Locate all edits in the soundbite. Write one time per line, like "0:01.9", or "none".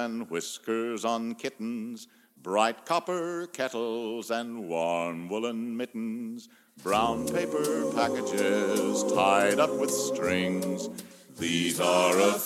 none